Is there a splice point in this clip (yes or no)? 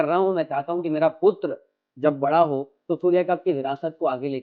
no